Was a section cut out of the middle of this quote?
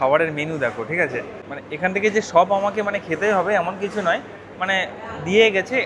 yes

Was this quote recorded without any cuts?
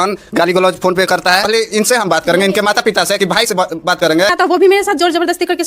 no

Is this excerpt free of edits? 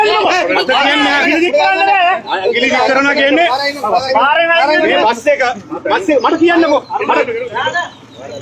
yes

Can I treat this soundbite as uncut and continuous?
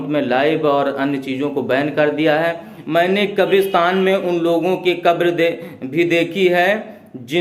no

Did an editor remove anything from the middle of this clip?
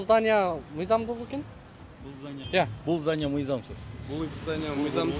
yes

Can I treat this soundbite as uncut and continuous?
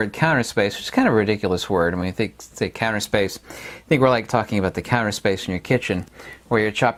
yes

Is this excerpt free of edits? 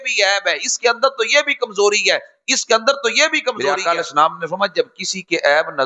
no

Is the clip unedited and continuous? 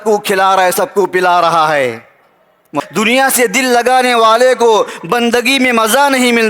no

